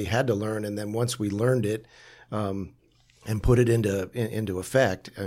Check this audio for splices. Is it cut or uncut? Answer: uncut